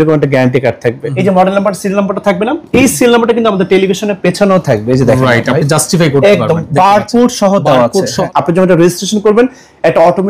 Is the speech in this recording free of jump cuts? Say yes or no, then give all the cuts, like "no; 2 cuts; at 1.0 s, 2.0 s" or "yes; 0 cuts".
no; 2 cuts; at 1.1 s, 8.2 s